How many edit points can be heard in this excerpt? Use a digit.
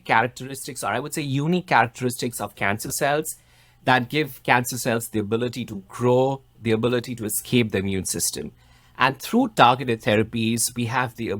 0